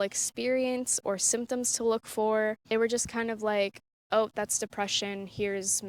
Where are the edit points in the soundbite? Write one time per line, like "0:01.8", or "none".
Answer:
0:02.6